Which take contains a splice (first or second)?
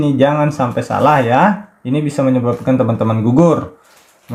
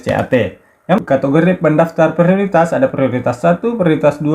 second